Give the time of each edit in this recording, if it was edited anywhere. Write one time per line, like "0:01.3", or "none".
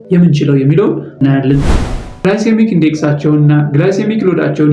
0:01.9